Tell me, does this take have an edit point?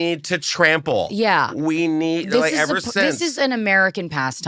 no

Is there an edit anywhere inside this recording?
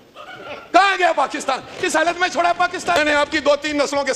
yes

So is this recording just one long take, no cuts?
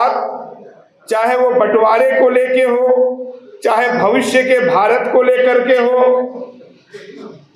yes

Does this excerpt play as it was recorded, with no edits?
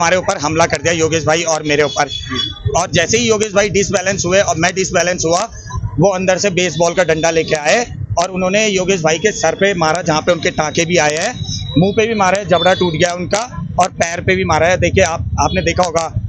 yes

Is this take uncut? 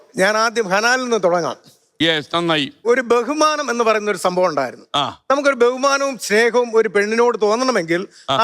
no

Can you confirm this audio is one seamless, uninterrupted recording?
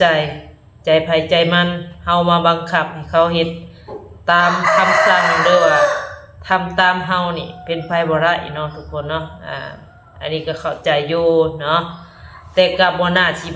yes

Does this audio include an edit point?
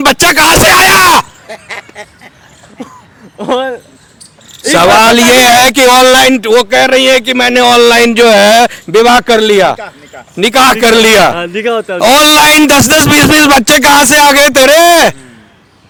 no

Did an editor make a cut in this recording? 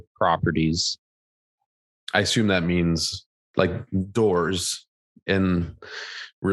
no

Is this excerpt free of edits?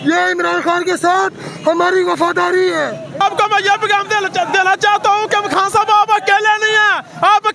no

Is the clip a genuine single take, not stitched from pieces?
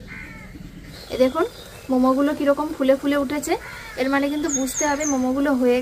no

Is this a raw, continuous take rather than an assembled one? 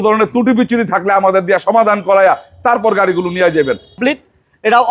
no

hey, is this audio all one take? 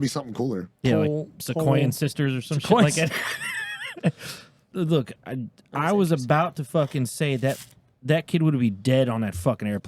no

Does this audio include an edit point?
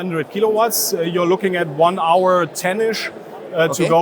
no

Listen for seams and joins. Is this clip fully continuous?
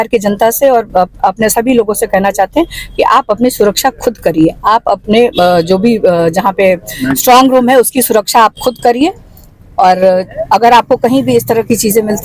yes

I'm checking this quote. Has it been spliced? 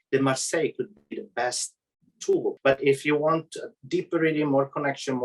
yes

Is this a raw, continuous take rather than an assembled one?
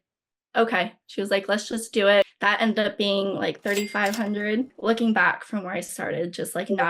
no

